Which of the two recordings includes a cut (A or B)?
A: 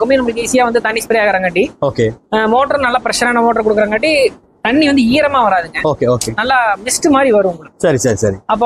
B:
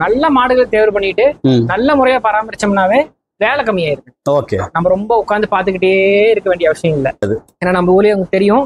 B